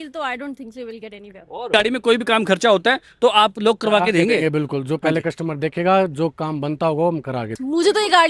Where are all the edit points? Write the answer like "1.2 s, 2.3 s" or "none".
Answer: 1.7 s, 7.4 s

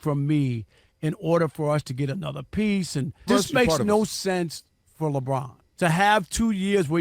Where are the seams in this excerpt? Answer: 3.2 s, 5.6 s

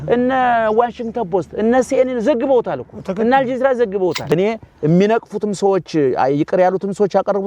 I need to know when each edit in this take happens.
4.3 s

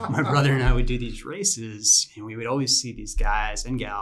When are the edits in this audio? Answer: 1.1 s

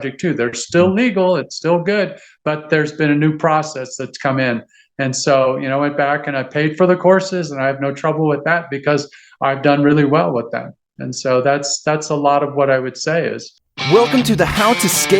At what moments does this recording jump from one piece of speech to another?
13.5 s

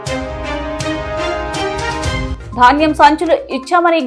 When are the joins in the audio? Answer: none

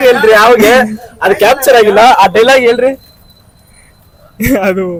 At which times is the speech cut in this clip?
none

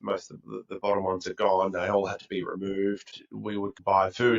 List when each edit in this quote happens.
3.2 s

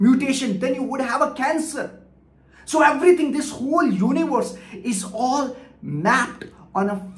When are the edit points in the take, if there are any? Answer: none

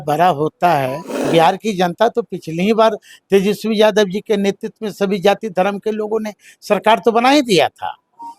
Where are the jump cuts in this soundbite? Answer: 1.1 s

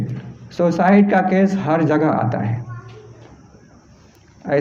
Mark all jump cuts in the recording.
none

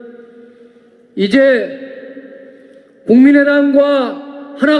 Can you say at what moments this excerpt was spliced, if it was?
3.7 s

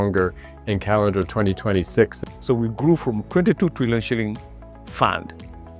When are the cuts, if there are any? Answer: 2.2 s

